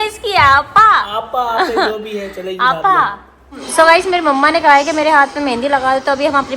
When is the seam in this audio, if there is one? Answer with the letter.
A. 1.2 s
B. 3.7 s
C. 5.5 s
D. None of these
B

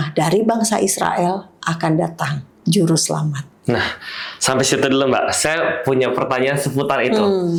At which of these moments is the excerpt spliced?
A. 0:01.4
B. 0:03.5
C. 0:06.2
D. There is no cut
D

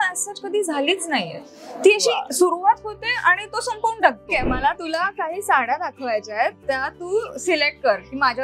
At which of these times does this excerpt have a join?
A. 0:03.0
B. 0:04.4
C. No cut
B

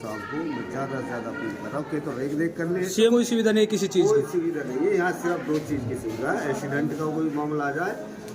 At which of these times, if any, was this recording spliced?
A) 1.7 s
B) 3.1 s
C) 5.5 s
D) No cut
B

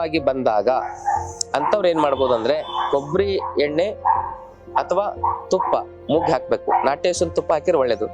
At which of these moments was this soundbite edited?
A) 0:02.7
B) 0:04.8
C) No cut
A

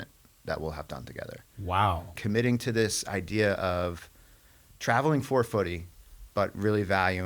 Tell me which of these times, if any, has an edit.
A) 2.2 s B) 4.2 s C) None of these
A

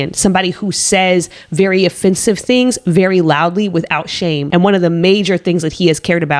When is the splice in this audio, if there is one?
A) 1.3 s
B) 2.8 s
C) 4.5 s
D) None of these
C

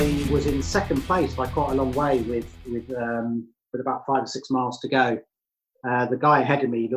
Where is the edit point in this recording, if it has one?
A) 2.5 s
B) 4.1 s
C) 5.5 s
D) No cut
D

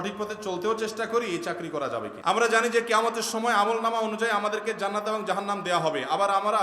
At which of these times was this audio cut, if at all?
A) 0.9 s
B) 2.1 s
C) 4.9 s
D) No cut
B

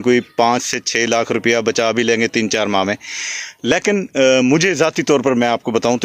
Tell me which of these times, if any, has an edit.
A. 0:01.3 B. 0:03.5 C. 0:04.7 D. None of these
D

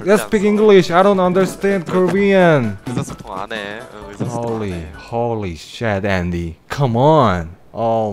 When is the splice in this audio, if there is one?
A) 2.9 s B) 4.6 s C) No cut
A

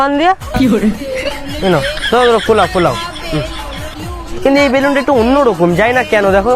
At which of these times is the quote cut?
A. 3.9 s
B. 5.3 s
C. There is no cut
A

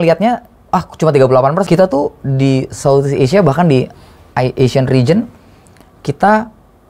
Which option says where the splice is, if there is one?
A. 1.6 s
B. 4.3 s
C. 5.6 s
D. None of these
A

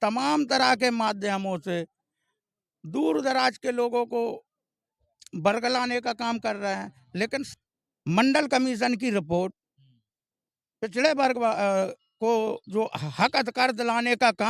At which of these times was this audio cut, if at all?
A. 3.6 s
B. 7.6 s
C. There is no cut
B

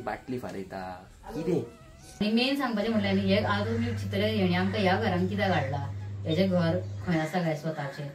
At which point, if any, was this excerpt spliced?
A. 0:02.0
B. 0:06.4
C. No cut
A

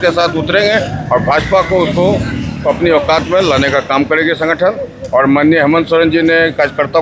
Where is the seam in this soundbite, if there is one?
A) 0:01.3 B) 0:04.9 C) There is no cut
C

